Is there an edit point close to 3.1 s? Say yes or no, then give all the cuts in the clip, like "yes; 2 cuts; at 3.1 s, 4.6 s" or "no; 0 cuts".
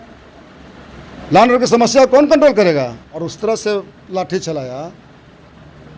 yes; 1 cut; at 3.1 s